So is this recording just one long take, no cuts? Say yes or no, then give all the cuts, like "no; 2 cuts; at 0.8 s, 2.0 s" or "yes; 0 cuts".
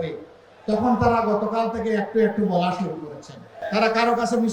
no; 1 cut; at 3.6 s